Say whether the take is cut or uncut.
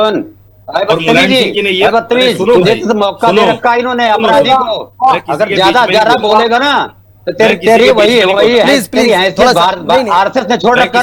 uncut